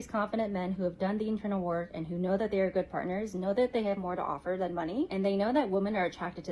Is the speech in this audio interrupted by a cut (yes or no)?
yes